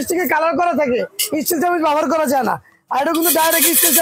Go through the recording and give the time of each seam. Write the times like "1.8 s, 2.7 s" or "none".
none